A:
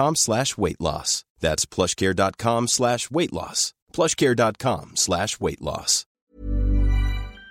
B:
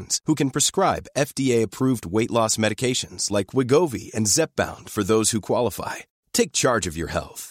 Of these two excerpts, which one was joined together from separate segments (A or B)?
A